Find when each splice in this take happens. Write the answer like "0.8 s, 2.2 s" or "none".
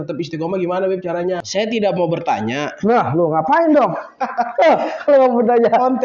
1.4 s